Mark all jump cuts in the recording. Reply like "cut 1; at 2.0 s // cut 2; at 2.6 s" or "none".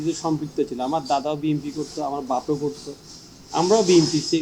none